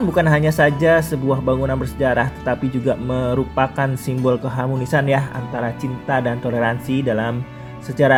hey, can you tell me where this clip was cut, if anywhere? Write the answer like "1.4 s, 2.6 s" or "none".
none